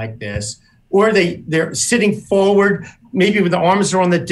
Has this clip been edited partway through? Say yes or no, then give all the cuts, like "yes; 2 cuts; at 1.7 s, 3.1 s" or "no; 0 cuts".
no; 0 cuts